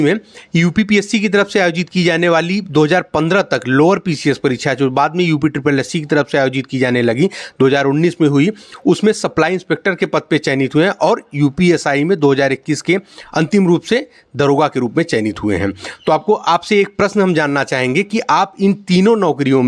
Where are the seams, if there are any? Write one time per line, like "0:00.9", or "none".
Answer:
none